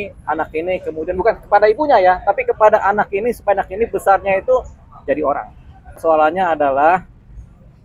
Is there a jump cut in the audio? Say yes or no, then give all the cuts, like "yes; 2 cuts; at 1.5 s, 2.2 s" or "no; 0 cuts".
yes; 1 cut; at 6.0 s